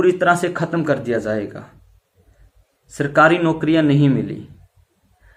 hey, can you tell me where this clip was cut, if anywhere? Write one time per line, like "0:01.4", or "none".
none